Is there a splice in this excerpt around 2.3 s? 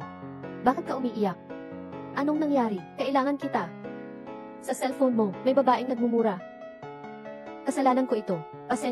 no; 0 cuts

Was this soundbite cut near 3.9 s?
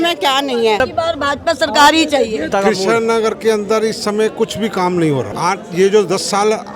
no; 3 cuts; at 0.8 s, 2.5 s, 5.3 s

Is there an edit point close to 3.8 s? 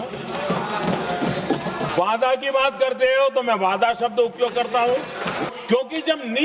no; 2 cuts; at 1.9 s, 5.5 s

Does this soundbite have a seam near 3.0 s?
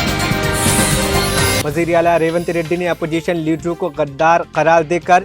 no; 1 cut; at 1.6 s

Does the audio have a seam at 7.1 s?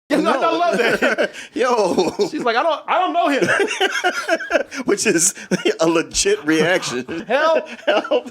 yes; 1 cut; at 7.1 s

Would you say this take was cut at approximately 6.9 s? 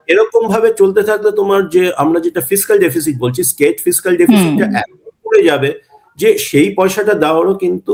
no; 0 cuts

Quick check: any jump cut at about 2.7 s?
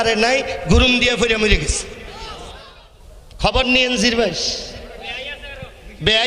yes; 1 cut; at 2.7 s

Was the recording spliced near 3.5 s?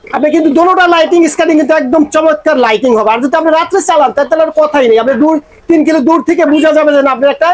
no; 0 cuts

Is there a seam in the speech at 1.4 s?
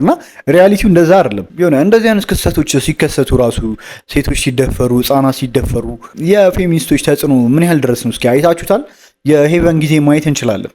yes; 1 cut; at 1.4 s

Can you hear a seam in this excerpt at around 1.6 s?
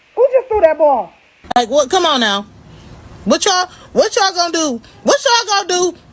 yes; 1 cut; at 1.6 s

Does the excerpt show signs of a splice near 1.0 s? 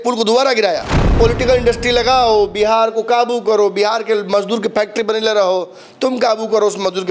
yes; 1 cut; at 1.0 s

